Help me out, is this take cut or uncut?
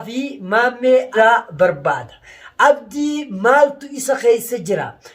cut